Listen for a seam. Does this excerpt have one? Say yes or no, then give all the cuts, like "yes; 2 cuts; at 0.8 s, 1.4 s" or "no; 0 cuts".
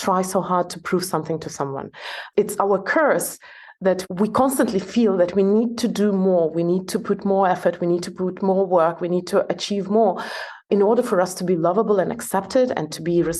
yes; 3 cuts; at 2.2 s, 4.0 s, 10.7 s